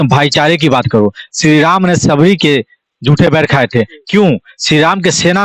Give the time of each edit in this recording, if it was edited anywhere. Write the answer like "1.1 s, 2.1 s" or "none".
none